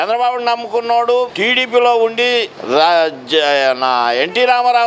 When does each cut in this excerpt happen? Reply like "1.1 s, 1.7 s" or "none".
1.3 s, 2.5 s